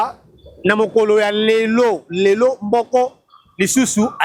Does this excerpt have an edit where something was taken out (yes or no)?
no